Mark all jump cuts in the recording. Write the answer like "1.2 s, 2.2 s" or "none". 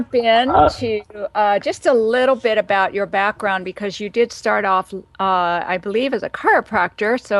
1.8 s

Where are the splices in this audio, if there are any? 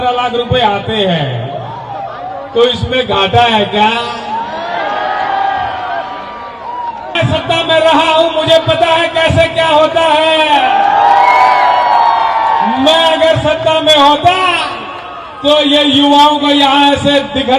7.2 s

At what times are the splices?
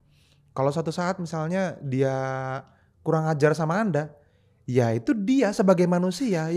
none

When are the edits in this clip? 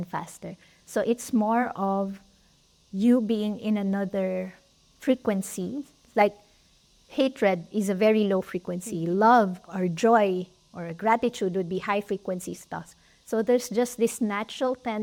none

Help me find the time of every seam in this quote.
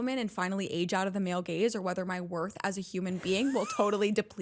none

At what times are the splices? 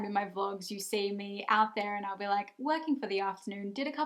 none

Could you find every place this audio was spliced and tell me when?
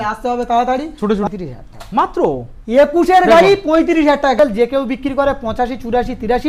1.3 s, 4.4 s

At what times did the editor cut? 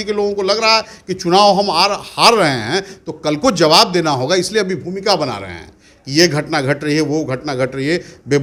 none

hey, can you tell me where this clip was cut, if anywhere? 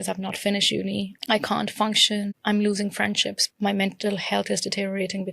1.2 s, 2.4 s, 3.4 s

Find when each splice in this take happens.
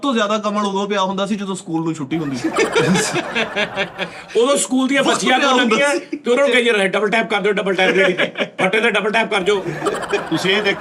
none

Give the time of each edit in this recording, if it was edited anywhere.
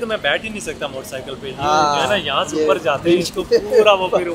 none

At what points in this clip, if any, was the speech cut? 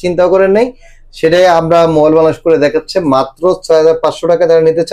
none

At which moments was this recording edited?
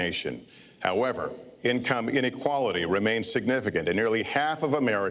3.6 s

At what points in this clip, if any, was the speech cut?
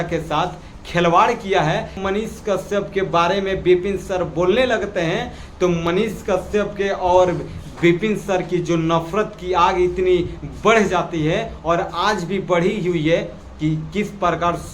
2.0 s

